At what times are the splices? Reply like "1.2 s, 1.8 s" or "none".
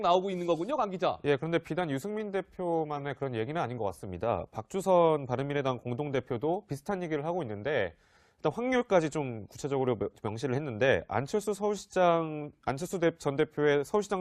10.4 s